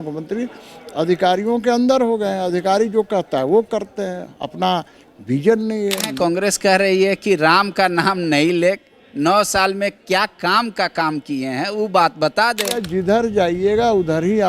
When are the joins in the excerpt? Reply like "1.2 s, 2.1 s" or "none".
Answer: 6.1 s, 12.9 s